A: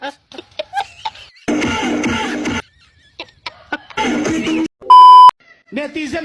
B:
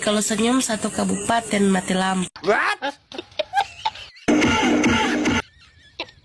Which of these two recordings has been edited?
A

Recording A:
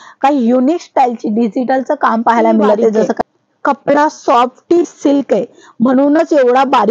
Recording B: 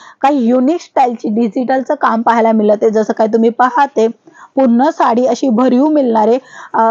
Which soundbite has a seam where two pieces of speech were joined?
A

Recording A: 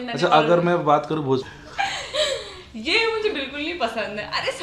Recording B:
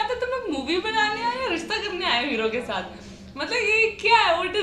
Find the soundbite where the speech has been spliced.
A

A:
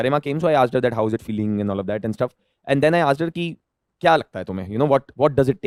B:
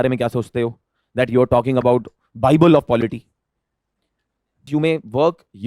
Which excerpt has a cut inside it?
B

